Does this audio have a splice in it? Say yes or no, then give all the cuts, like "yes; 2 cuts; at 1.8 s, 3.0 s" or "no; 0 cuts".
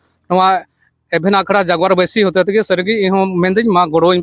no; 0 cuts